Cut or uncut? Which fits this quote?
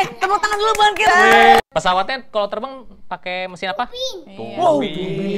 cut